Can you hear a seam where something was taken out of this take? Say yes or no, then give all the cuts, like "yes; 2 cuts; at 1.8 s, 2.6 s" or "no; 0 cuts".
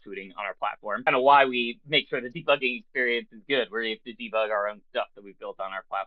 yes; 1 cut; at 1.0 s